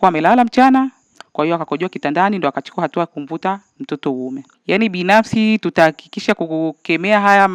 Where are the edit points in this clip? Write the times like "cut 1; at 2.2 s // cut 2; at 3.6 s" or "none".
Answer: none